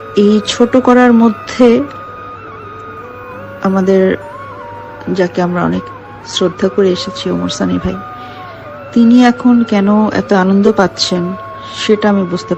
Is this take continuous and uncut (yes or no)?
yes